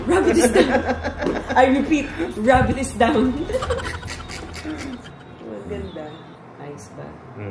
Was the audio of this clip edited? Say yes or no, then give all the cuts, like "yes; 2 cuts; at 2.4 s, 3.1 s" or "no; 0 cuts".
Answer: no; 0 cuts